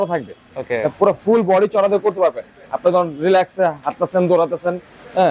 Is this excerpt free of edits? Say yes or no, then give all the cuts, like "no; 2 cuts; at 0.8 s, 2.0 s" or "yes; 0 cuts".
yes; 0 cuts